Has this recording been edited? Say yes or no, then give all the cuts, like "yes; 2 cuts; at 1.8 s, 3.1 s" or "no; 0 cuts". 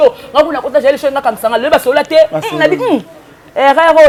no; 0 cuts